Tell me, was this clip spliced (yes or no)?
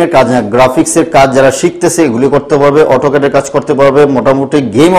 no